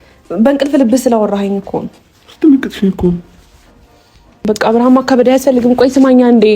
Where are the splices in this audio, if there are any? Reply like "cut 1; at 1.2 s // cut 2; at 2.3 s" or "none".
cut 1; at 4.4 s